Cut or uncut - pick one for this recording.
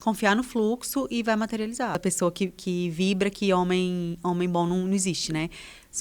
cut